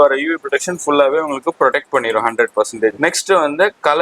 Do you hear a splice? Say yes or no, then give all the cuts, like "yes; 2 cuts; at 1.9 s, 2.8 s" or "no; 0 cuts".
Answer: yes; 1 cut; at 3.0 s